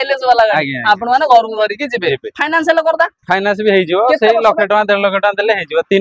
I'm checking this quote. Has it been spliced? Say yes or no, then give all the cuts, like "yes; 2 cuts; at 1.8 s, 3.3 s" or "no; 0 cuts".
no; 0 cuts